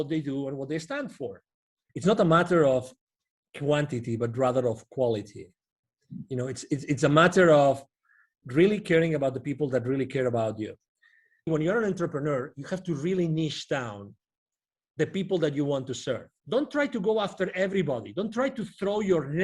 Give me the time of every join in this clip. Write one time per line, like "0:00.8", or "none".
0:01.8
0:11.5
0:16.3